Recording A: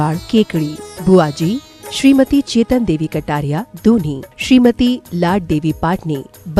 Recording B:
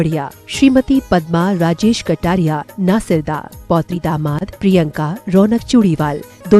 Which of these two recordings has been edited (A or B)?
B